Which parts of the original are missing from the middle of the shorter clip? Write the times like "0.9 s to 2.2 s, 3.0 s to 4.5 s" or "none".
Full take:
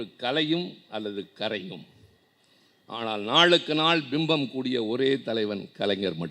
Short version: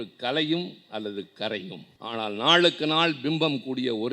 1.9 s to 2.7 s